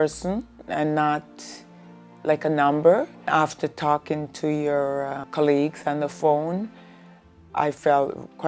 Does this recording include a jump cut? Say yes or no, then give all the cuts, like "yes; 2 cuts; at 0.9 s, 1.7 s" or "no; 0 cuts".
yes; 2 cuts; at 3.3 s, 5.2 s